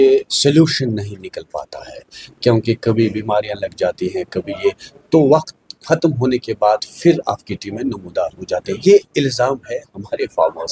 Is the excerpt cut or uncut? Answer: uncut